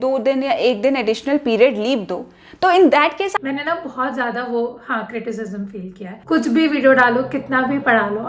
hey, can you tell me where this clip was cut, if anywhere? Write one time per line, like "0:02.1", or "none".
0:03.4
0:06.1